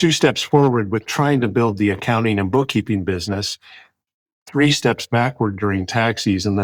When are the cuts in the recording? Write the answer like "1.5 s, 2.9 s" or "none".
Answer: none